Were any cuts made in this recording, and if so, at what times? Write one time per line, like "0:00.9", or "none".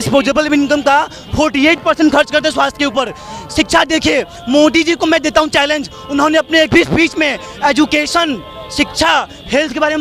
none